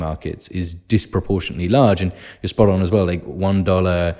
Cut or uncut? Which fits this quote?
uncut